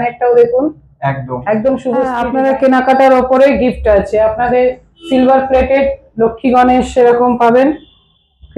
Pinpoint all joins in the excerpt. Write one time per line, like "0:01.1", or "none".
0:02.2